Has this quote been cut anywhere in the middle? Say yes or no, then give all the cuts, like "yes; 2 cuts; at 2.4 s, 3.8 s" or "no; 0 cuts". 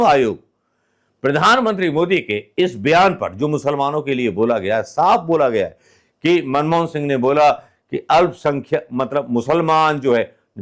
no; 0 cuts